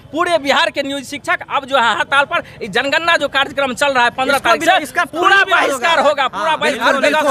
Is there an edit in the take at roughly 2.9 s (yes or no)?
no